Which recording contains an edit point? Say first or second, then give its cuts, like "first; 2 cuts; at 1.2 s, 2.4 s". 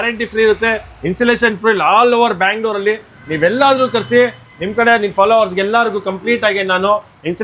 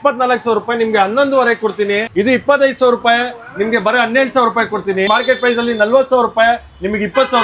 second; 2 cuts; at 2.1 s, 5.1 s